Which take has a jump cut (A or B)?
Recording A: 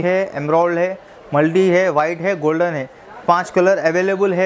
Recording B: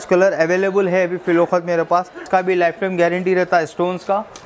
B